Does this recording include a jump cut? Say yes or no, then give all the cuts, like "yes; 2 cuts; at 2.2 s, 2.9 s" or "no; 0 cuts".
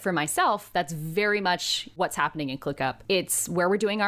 yes; 2 cuts; at 1.9 s, 3.0 s